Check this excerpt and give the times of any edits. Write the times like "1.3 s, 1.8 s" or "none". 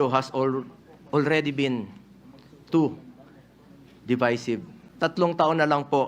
4.8 s